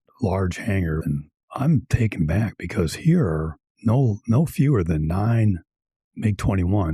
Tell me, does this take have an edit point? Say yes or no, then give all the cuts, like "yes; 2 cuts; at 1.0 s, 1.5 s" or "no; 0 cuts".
yes; 1 cut; at 1.0 s